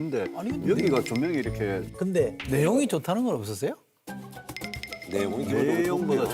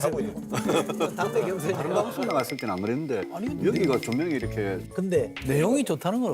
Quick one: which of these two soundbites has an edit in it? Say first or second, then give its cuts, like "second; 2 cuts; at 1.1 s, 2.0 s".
second; 1 cut; at 2.1 s